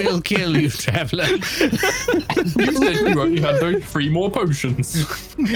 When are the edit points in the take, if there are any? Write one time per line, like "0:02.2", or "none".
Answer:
none